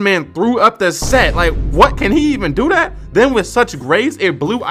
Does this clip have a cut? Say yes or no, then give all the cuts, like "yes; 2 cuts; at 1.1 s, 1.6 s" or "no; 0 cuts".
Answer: no; 0 cuts